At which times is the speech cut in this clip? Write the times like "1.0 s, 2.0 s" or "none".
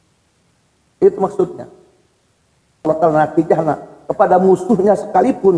2.8 s